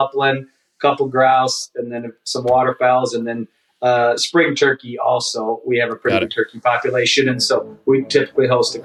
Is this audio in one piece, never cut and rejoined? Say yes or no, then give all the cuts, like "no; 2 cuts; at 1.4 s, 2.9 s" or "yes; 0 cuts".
yes; 0 cuts